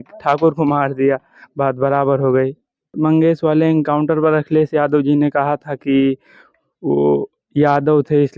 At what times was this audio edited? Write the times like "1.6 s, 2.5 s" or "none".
2.9 s